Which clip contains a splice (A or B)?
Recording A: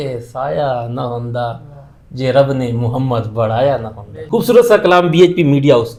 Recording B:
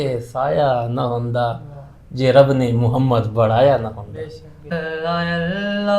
B